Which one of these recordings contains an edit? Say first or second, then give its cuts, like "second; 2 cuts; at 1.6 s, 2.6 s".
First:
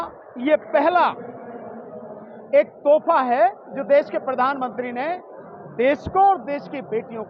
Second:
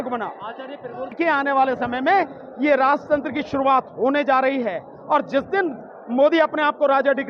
second; 1 cut; at 1.1 s